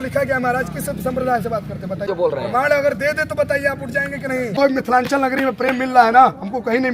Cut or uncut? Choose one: cut